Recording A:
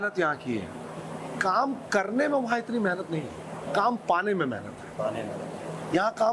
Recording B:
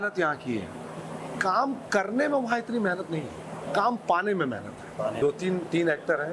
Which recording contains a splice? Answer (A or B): B